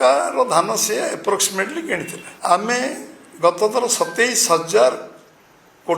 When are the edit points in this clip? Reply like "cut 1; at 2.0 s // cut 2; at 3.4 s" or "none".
cut 1; at 2.3 s